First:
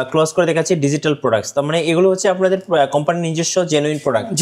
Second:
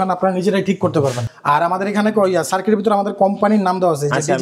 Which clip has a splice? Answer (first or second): second